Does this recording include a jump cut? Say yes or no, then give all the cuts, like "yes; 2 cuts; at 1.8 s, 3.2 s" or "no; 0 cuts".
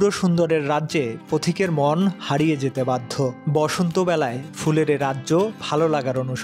yes; 1 cut; at 3.4 s